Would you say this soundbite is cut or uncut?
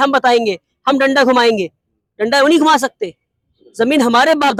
uncut